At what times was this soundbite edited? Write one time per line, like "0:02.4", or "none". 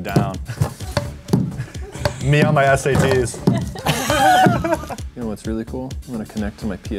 0:05.0